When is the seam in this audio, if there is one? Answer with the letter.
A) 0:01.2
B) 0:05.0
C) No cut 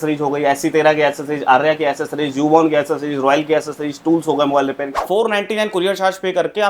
B